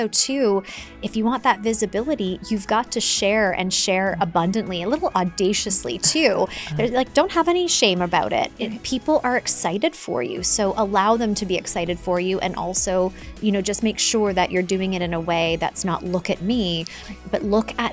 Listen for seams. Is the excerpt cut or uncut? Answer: uncut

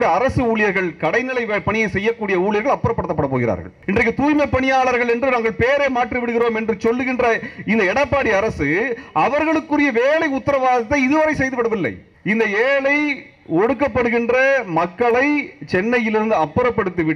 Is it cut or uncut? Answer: cut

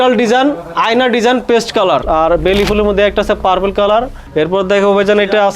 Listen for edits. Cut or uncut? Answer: cut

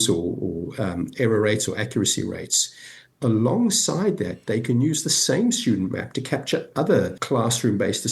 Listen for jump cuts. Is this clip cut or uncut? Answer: cut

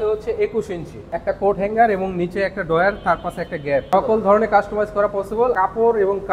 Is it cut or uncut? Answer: cut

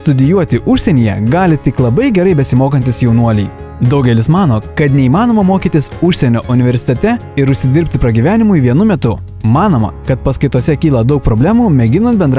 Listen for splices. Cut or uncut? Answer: cut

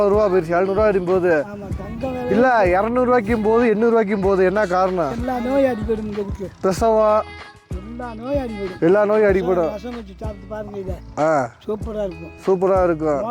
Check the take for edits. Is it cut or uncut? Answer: cut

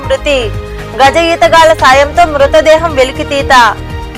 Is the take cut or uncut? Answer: uncut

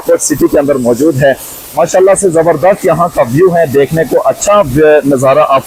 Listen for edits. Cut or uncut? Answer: uncut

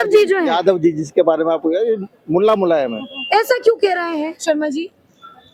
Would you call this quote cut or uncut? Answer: uncut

